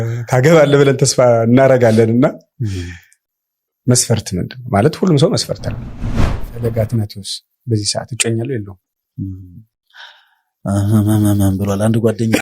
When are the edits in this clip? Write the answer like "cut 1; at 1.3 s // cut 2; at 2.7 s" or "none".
cut 1; at 6.2 s